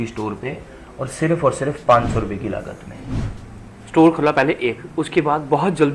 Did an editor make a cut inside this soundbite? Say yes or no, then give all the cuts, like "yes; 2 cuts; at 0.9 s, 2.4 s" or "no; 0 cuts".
yes; 1 cut; at 3.2 s